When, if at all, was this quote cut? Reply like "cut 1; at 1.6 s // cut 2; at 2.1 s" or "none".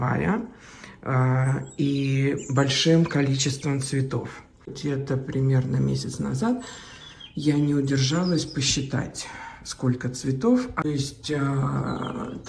cut 1; at 4.7 s // cut 2; at 10.8 s